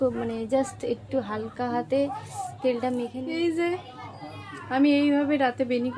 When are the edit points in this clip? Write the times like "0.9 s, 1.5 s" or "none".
3.2 s